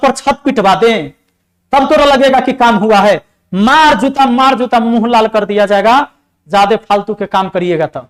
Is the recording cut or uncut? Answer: uncut